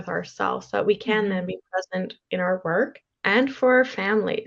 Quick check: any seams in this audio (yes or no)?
yes